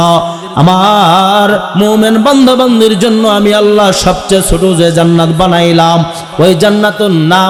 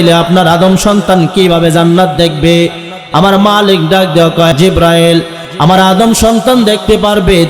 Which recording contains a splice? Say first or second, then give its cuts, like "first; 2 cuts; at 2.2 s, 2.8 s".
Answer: second; 1 cut; at 4.5 s